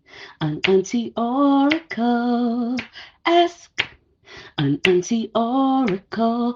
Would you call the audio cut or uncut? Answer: uncut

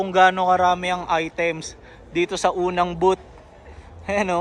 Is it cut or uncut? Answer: uncut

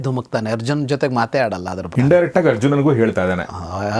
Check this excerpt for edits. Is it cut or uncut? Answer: cut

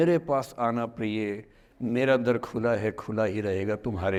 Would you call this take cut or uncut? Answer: uncut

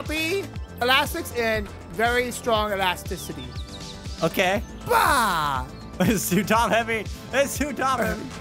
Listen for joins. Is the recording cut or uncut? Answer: cut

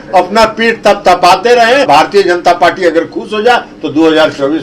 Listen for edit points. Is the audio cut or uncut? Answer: cut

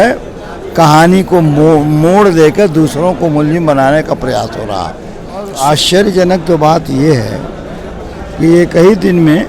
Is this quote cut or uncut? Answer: cut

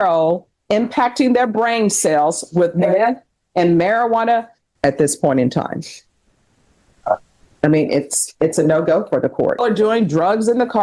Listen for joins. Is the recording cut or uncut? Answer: cut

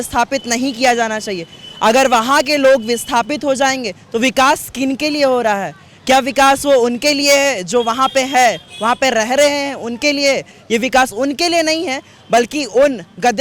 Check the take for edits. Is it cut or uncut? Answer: uncut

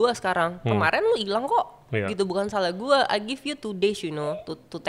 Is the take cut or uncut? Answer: uncut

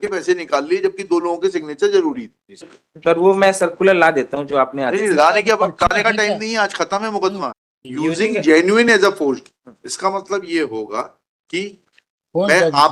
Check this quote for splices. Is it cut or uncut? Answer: cut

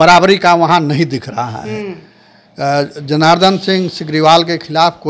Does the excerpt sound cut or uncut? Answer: uncut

